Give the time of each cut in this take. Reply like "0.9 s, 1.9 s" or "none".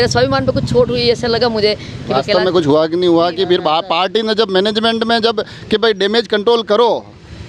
none